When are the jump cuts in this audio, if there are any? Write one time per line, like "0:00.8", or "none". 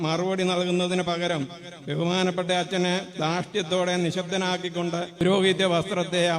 0:05.2